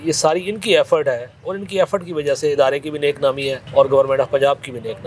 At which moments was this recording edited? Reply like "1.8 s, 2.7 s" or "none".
3.6 s